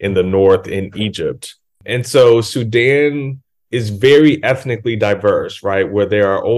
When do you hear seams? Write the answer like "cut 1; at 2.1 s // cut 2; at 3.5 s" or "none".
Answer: cut 1; at 1.8 s